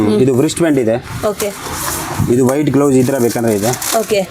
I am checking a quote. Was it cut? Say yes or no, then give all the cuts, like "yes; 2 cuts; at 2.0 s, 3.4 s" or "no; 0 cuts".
no; 0 cuts